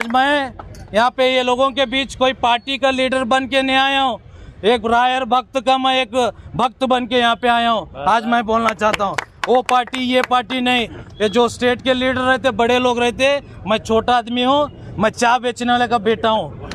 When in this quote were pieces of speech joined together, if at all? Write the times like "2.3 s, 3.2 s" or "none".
none